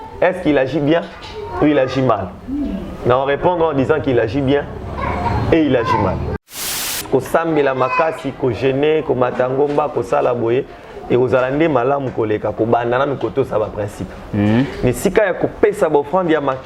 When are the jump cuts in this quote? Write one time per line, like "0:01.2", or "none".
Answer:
0:06.8